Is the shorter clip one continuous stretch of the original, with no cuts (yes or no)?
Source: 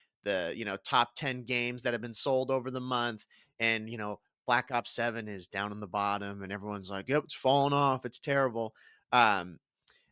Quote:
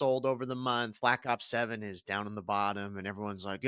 no